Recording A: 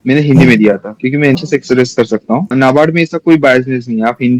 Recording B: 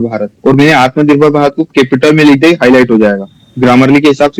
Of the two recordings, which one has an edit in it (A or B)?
A